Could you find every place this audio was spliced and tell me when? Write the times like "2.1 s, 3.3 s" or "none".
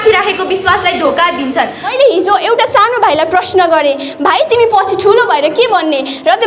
1.9 s